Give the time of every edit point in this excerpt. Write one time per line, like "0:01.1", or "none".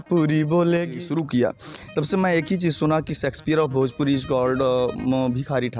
0:01.0

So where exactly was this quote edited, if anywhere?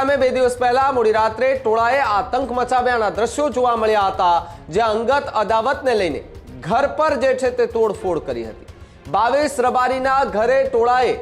none

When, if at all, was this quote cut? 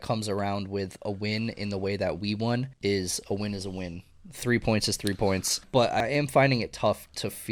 0:02.7
0:05.8

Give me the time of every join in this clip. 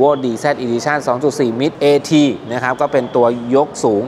none

